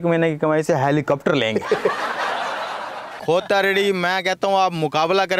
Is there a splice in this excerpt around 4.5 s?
no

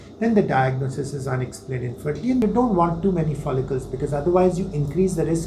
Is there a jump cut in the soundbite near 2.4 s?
yes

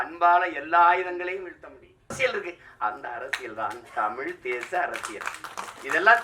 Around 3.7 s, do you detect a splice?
no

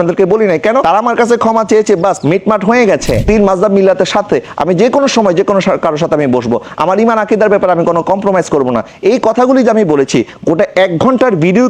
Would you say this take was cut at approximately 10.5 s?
no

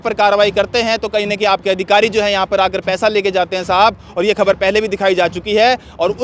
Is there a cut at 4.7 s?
no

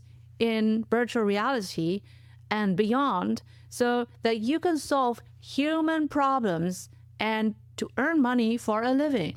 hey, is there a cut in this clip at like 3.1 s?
no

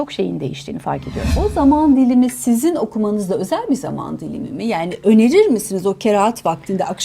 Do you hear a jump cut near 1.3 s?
yes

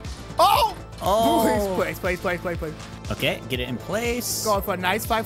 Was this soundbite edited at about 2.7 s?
yes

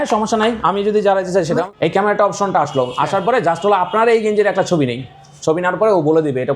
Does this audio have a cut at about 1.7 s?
yes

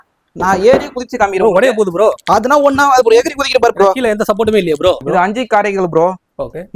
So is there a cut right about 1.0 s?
no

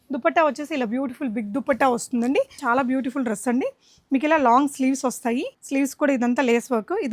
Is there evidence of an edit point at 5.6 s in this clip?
yes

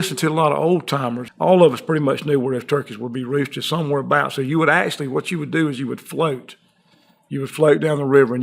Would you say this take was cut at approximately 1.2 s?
yes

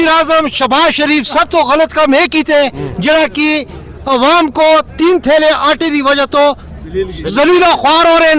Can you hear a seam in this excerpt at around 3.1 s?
no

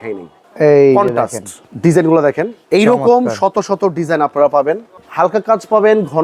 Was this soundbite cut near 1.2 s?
no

